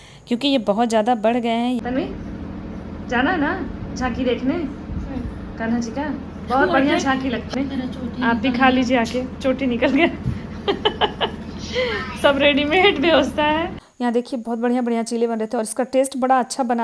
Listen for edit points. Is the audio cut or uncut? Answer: cut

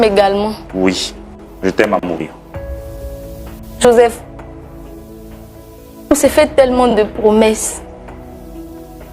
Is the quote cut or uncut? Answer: cut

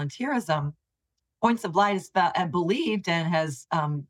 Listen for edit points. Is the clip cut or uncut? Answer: uncut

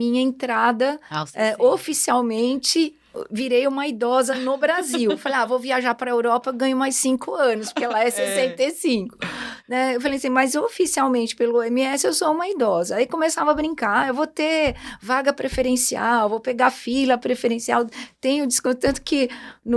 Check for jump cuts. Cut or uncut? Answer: uncut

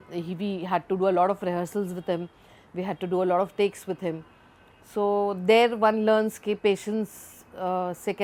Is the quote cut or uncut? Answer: uncut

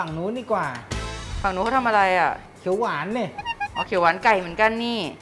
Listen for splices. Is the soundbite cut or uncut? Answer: uncut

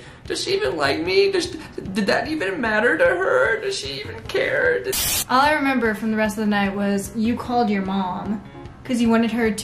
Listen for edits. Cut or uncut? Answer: cut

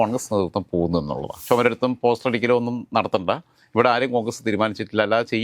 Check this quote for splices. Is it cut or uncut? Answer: cut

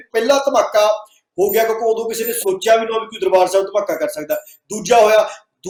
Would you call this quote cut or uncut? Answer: uncut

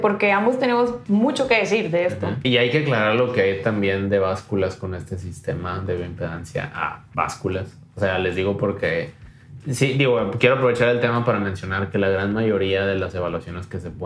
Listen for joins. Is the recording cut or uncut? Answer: cut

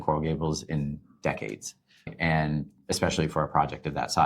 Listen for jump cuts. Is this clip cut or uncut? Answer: cut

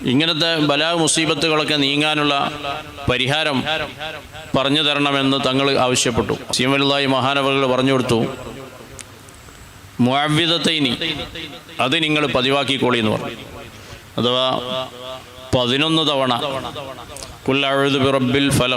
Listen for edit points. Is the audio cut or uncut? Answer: cut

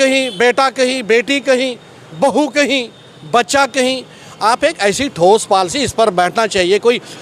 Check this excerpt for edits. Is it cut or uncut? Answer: uncut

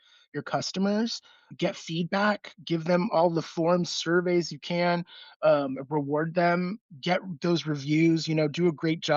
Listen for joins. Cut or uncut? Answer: cut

